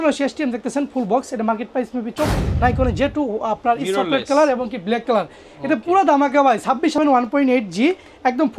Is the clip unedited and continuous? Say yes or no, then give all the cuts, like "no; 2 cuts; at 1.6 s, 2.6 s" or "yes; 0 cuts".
no; 2 cuts; at 2.3 s, 7.0 s